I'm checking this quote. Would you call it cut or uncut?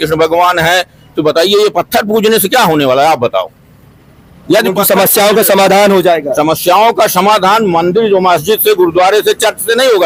uncut